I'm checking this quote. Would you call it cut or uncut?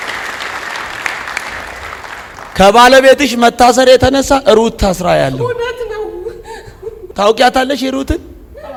uncut